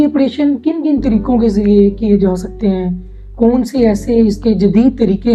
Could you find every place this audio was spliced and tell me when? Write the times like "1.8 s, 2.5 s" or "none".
none